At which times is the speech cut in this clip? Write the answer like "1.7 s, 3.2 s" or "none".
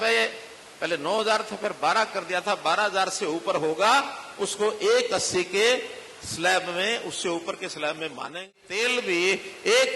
8.5 s